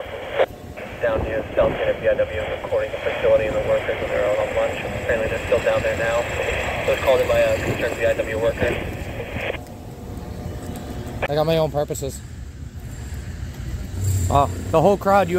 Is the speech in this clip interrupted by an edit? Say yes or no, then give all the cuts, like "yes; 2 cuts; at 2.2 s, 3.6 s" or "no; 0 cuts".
yes; 1 cut; at 11.1 s